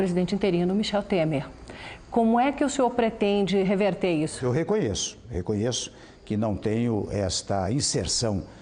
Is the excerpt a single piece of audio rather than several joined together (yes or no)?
no